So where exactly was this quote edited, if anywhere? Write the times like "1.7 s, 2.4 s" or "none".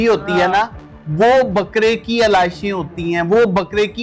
none